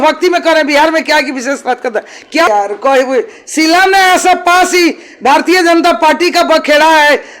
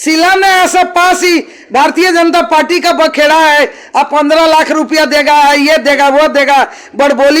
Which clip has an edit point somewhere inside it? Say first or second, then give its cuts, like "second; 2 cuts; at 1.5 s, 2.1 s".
first; 1 cut; at 2.5 s